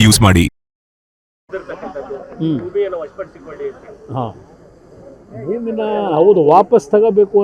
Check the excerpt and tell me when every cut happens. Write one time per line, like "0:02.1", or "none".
0:01.4